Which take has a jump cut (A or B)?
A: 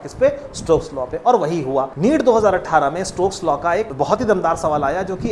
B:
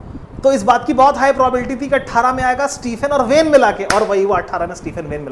A